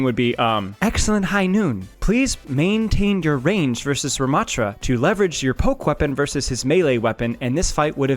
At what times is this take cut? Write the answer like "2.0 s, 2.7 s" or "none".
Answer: 1.9 s, 4.8 s